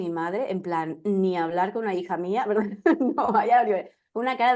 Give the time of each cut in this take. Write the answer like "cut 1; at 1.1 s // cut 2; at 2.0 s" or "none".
none

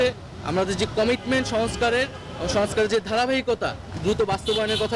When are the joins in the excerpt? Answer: cut 1; at 3.9 s

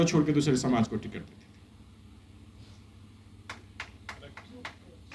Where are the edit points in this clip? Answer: none

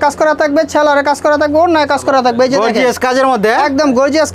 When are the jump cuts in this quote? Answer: none

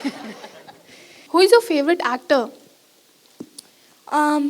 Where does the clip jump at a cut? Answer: cut 1; at 1.1 s

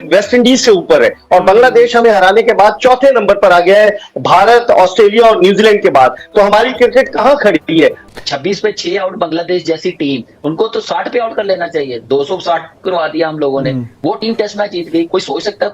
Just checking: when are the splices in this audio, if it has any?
cut 1; at 8.0 s

